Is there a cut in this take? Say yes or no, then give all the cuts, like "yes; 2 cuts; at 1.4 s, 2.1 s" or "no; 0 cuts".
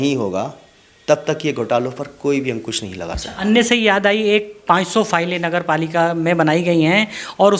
no; 0 cuts